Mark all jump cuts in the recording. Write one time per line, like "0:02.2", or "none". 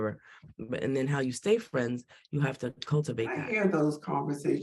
0:03.4